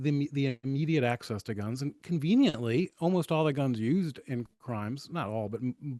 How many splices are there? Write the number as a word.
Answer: zero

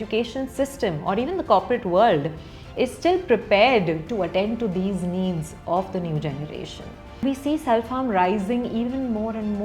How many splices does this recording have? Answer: one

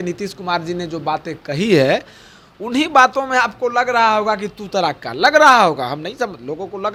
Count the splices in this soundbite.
zero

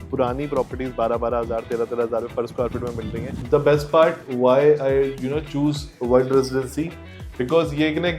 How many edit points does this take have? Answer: one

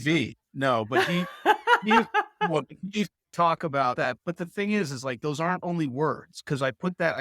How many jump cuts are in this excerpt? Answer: one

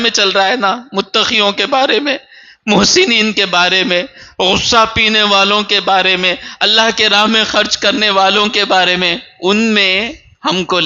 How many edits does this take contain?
zero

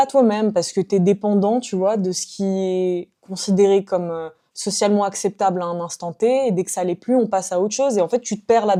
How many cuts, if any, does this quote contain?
zero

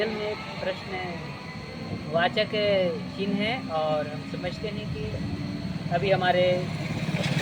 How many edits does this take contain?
zero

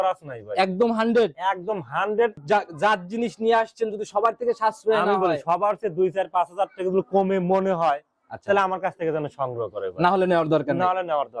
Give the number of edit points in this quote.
one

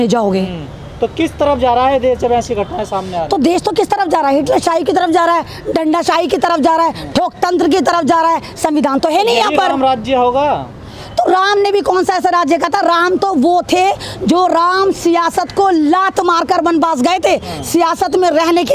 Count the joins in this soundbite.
zero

